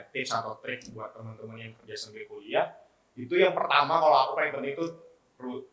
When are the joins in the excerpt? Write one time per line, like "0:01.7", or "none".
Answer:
none